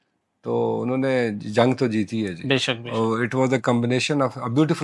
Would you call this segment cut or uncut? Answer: uncut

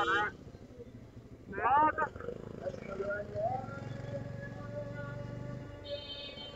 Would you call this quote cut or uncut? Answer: uncut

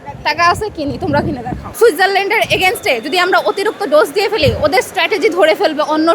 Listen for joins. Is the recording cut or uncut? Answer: cut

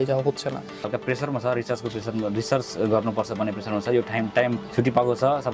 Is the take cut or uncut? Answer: cut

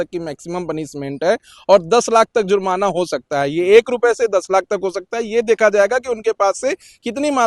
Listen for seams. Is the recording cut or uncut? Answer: uncut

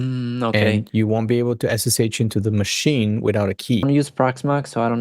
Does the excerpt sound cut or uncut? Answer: cut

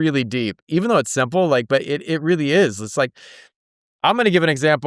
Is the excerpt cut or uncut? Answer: uncut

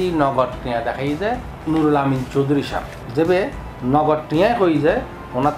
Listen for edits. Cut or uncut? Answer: uncut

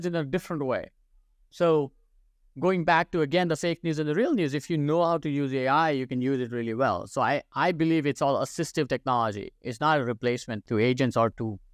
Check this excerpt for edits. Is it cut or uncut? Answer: uncut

